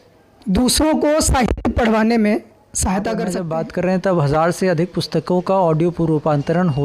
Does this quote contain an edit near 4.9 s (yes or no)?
no